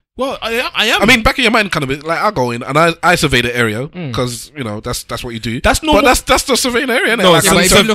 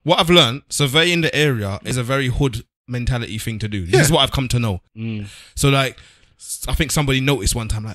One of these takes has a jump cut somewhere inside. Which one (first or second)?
second